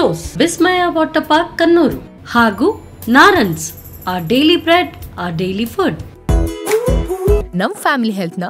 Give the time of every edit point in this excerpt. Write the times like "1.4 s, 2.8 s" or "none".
6.1 s